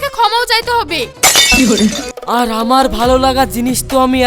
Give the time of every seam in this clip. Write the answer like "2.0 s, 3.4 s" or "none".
2.1 s

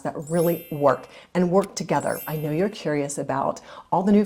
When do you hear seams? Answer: 2.3 s

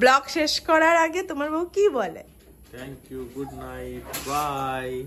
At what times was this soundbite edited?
none

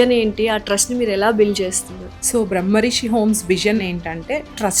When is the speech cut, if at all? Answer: 3.9 s

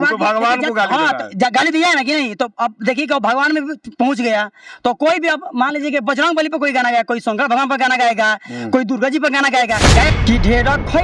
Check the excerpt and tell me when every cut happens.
10.1 s

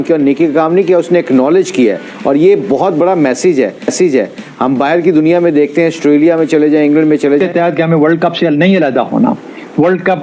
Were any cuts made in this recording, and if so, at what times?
7.4 s

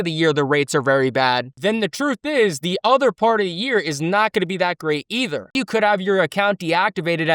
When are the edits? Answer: 5.5 s

